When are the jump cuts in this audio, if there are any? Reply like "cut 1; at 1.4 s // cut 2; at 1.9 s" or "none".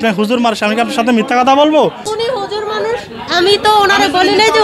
cut 1; at 2.1 s

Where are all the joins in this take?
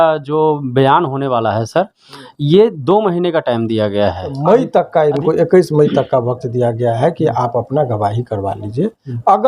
cut 1; at 4.4 s

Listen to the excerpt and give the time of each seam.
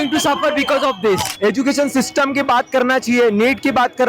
cut 1; at 1.3 s

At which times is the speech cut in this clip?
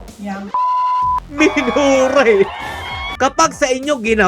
cut 1; at 1.3 s // cut 2; at 3.0 s

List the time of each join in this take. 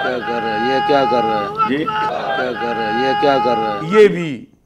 cut 1; at 2.1 s // cut 2; at 3.8 s

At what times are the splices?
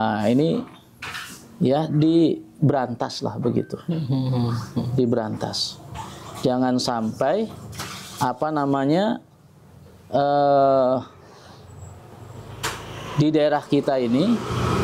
none

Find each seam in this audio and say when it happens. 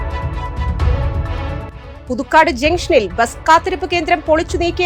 cut 1; at 1.8 s

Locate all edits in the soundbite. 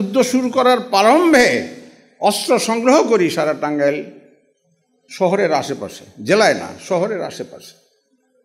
none

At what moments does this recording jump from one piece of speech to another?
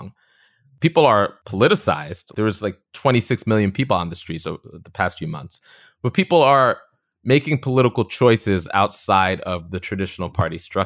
cut 1; at 2.2 s

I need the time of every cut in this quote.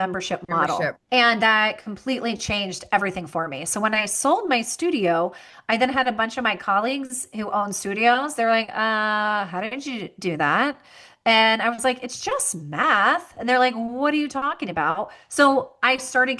cut 1; at 1.0 s

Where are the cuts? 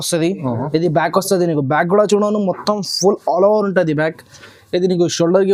none

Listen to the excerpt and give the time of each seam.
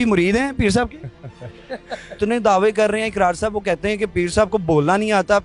cut 1; at 2.2 s

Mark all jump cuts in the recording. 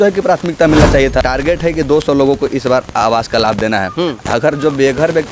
cut 1; at 1.2 s

